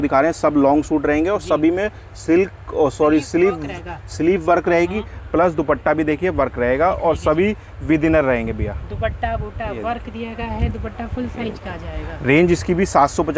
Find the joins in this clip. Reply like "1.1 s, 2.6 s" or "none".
none